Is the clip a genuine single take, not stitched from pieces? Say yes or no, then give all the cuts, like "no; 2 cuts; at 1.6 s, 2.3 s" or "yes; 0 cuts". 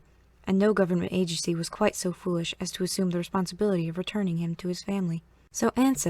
yes; 0 cuts